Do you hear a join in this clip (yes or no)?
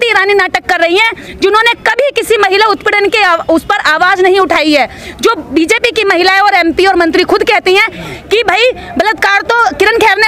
no